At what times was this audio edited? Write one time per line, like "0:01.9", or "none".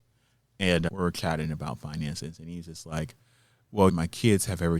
0:00.9